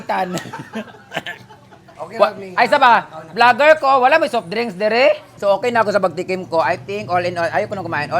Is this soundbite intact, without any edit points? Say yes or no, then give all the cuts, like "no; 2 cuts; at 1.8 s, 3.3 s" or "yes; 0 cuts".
no; 2 cuts; at 1.9 s, 5.3 s